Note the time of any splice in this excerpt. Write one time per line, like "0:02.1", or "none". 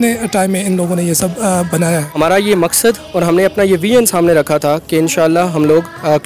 0:02.1